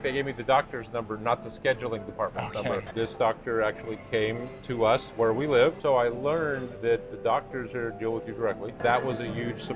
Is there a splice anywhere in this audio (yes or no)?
yes